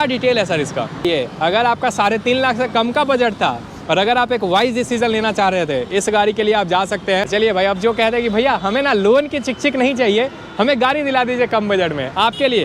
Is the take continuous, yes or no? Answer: no